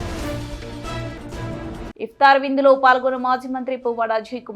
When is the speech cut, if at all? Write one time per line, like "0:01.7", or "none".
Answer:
0:01.9